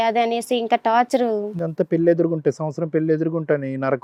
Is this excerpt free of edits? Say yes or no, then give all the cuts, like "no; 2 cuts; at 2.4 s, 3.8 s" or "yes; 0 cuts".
yes; 0 cuts